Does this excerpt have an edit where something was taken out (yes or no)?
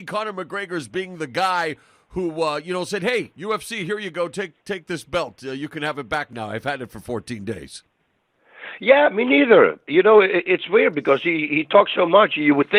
no